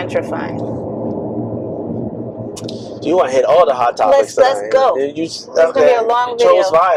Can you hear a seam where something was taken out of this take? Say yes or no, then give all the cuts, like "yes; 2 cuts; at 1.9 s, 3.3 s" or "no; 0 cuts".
no; 0 cuts